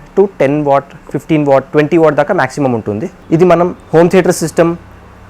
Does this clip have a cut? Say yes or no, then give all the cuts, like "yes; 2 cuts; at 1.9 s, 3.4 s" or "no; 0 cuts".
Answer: yes; 1 cut; at 3.1 s